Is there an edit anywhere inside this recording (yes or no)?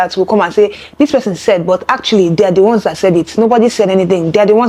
no